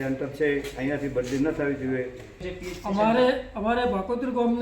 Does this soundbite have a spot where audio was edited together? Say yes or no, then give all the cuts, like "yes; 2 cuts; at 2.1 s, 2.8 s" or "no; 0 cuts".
yes; 1 cut; at 2.4 s